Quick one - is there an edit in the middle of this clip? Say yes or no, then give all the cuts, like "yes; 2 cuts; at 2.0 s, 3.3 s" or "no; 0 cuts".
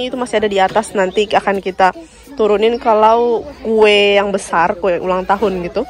no; 0 cuts